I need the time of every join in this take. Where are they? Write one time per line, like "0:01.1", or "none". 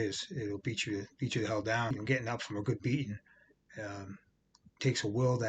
0:01.9